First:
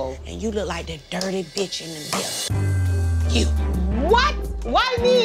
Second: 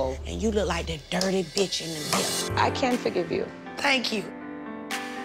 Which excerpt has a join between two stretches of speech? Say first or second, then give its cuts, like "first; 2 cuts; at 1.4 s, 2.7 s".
second; 1 cut; at 2.4 s